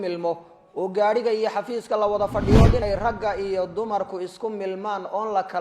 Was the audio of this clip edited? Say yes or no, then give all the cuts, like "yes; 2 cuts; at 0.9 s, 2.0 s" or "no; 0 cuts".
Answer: yes; 1 cut; at 2.8 s